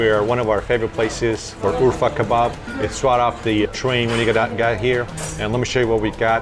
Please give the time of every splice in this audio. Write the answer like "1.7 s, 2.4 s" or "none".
none